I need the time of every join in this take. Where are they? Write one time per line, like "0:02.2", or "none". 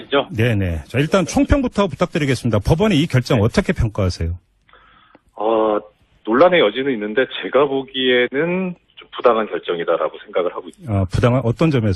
0:03.6